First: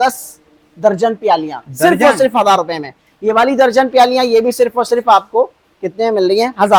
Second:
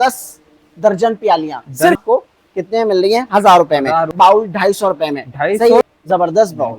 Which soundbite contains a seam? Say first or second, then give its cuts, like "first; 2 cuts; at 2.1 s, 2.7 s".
second; 3 cuts; at 2.0 s, 4.1 s, 5.8 s